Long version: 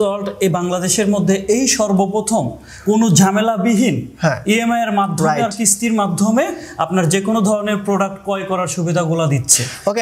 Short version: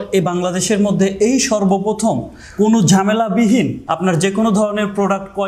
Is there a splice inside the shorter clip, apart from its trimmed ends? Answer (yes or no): yes